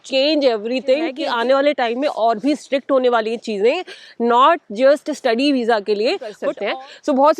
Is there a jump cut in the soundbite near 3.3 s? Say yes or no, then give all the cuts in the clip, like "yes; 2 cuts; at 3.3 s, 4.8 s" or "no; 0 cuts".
no; 2 cuts; at 1.2 s, 6.5 s